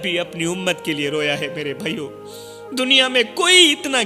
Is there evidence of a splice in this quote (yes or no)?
no